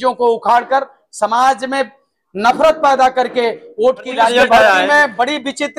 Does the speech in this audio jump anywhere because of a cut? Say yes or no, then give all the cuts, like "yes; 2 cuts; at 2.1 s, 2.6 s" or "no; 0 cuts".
yes; 1 cut; at 4.3 s